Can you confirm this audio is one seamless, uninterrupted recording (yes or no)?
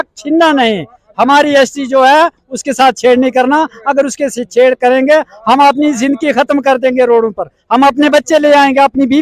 yes